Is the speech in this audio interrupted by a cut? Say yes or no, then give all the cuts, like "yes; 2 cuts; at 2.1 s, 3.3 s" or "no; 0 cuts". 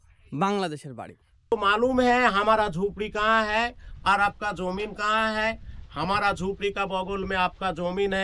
yes; 1 cut; at 1.3 s